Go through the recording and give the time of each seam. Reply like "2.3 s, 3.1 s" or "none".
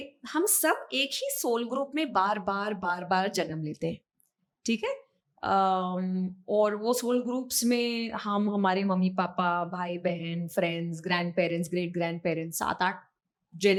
none